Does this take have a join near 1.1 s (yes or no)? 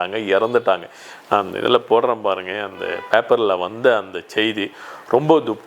no